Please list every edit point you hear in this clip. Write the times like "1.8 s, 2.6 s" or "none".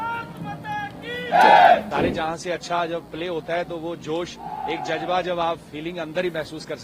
1.9 s